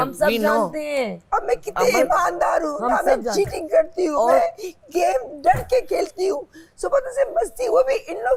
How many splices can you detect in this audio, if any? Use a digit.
0